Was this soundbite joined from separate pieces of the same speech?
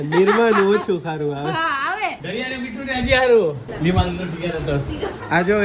yes; 1 cut; at 3.7 s

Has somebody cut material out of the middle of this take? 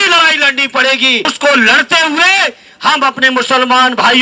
yes; 1 cut; at 1.3 s

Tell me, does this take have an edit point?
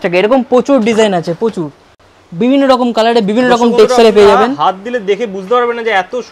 no; 0 cuts

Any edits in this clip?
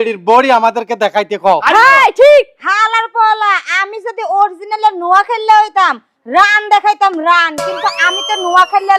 no; 0 cuts

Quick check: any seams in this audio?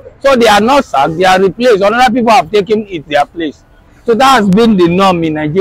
no; 0 cuts

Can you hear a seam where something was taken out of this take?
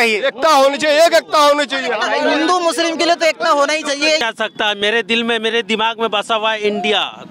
yes; 1 cut; at 4.2 s

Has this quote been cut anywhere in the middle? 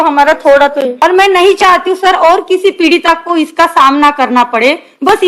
yes; 1 cut; at 0.9 s

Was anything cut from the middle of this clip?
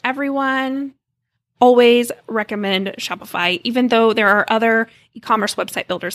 no; 0 cuts

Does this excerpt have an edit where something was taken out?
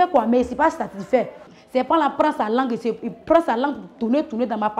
yes; 1 cut; at 1.5 s

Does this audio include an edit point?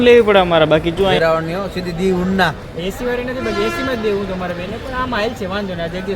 yes; 1 cut; at 1.1 s

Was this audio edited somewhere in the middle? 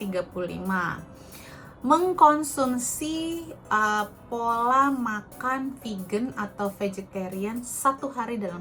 no; 0 cuts

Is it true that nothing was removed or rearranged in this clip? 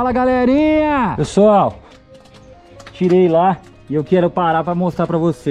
no; 1 cut; at 1.2 s

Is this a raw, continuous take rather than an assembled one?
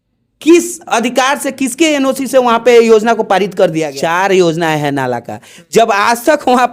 no; 1 cut; at 3.9 s

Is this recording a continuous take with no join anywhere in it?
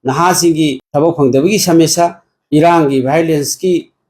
yes; 0 cuts

